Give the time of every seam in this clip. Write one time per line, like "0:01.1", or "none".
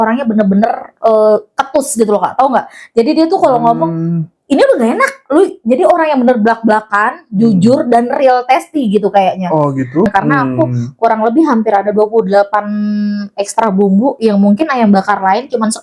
0:10.1